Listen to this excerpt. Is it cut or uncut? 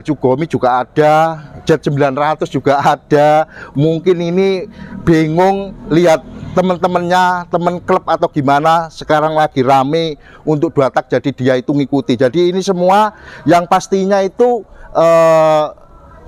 uncut